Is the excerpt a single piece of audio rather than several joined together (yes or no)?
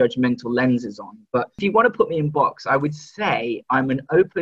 no